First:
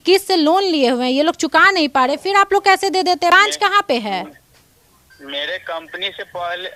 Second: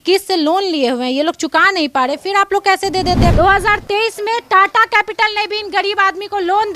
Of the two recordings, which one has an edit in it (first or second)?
second